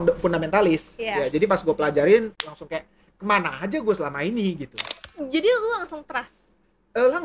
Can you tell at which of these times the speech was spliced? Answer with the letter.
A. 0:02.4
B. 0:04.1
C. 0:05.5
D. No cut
A